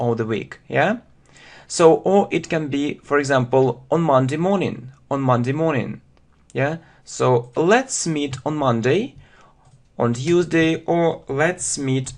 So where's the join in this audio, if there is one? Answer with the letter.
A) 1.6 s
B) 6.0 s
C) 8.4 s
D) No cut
C